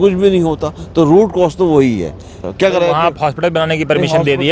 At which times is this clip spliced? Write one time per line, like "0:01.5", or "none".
0:02.4